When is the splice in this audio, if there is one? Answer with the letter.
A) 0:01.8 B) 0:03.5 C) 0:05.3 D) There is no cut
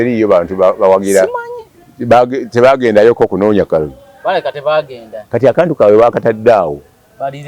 D